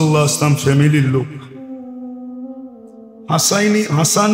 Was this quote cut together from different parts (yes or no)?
yes